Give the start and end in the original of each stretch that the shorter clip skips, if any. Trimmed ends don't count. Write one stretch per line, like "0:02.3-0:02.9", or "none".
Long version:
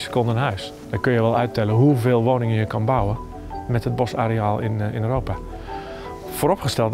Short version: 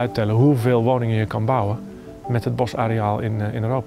none